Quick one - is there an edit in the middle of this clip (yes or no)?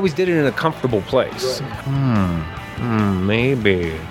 yes